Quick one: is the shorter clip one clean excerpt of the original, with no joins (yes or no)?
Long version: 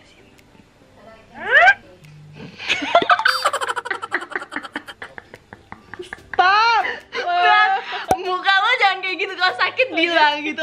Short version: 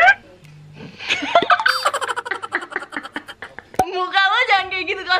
no